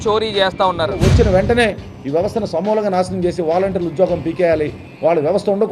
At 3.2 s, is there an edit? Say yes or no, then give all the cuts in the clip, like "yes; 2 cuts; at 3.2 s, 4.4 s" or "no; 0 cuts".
no; 1 cut; at 1.0 s